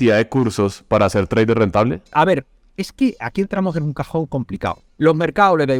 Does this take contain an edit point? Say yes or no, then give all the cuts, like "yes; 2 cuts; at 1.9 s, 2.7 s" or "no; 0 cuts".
yes; 2 cuts; at 2.1 s, 4.8 s